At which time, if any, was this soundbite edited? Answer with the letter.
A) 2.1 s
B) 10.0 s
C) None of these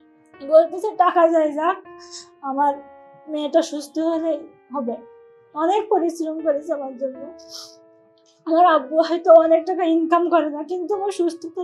C